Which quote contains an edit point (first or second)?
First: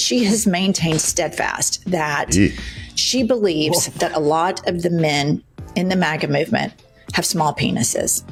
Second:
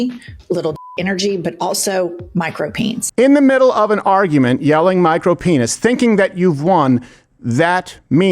second